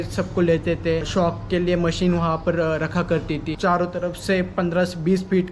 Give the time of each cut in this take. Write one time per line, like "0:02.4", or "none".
0:01.1
0:03.5